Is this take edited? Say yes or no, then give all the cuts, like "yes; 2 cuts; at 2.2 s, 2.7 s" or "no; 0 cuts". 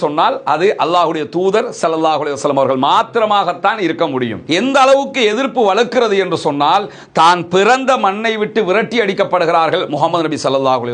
yes; 1 cut; at 4.5 s